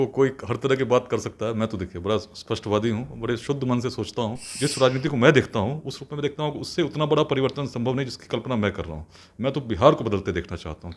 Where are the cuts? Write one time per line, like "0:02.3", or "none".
0:04.4

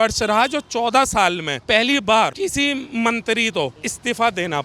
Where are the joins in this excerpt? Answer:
none

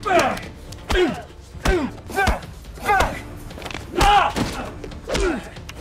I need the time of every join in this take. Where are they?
0:04.6

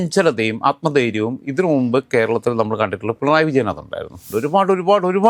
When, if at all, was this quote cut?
0:04.3

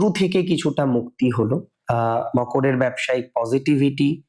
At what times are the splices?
0:01.8

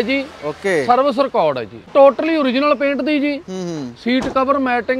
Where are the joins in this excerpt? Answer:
0:01.9

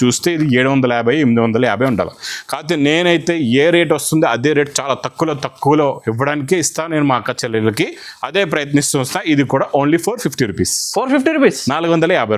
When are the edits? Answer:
none

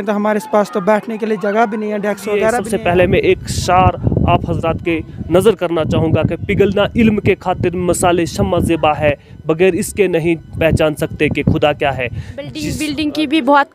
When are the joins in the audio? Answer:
0:02.7
0:12.6

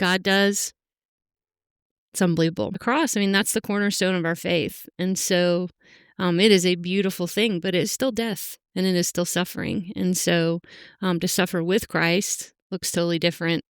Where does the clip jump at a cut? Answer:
0:02.8

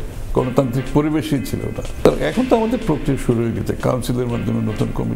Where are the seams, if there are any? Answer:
none

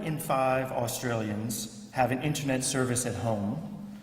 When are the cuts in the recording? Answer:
0:02.0

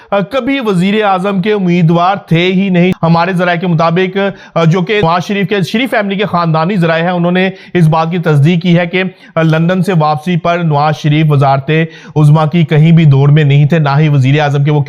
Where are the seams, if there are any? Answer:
0:02.9
0:05.0

